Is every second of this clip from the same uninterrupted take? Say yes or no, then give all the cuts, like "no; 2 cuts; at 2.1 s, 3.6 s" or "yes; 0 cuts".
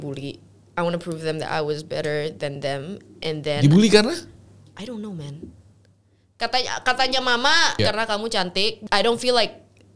no; 2 cuts; at 7.8 s, 8.8 s